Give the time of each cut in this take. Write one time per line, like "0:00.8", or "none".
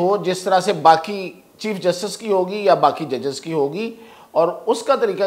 none